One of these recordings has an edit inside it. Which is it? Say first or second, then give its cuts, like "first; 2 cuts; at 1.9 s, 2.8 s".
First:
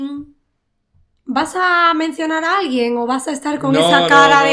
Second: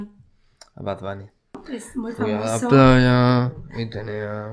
second; 1 cut; at 1.6 s